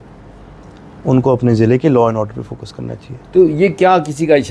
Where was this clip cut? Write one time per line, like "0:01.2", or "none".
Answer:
none